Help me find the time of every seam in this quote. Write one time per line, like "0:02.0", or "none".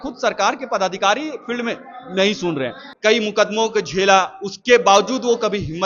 0:02.8